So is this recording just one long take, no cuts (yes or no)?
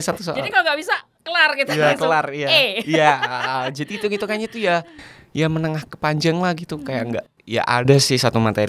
yes